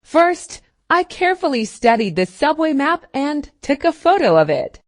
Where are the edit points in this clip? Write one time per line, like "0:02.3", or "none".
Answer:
0:03.1